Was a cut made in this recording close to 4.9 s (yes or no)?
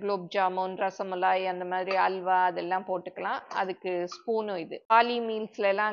yes